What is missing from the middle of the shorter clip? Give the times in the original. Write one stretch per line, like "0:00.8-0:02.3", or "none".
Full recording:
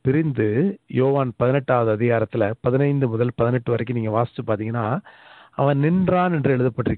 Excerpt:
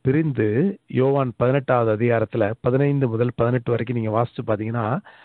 none